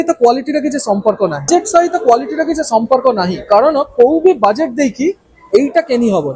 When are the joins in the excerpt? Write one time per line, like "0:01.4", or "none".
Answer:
0:01.5